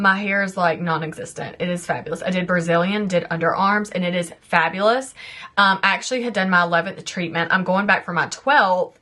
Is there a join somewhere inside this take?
no; 0 cuts

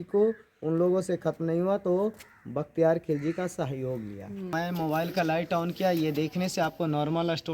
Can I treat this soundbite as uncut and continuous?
no; 1 cut; at 4.5 s

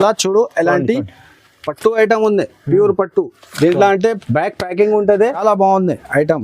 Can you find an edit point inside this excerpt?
yes; 1 cut; at 5.4 s

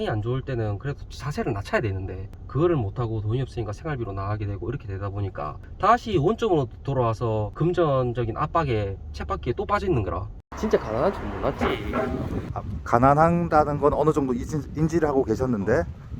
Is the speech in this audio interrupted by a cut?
yes; 1 cut; at 10.4 s

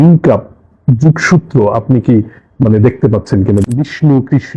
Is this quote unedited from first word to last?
no; 1 cut; at 3.6 s

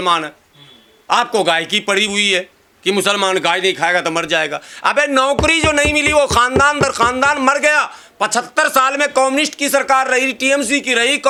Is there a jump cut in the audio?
no; 0 cuts

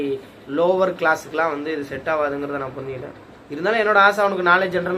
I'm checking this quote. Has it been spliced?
no; 0 cuts

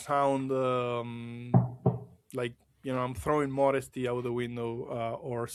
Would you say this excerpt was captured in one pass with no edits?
yes; 0 cuts

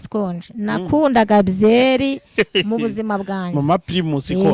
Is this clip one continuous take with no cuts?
yes; 0 cuts

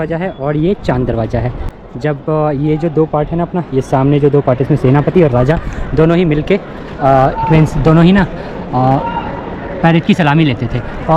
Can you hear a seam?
no; 0 cuts

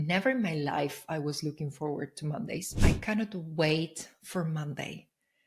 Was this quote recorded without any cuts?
no; 1 cut; at 2.7 s

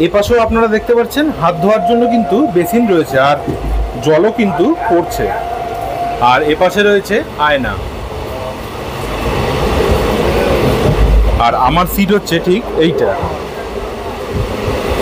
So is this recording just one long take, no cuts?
yes; 0 cuts

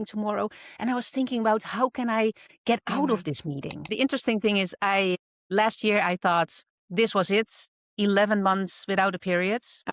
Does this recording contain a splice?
yes; 1 cut; at 3.9 s

